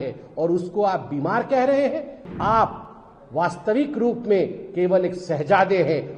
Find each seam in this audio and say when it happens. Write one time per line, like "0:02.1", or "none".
0:02.2